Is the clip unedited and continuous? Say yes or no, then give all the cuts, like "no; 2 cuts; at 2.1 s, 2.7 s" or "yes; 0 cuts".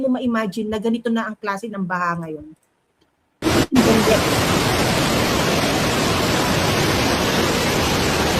yes; 0 cuts